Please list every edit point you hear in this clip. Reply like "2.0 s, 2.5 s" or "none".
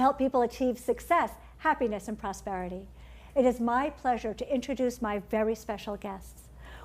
3.9 s